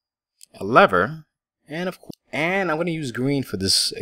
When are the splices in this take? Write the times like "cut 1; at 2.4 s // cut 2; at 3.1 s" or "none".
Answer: none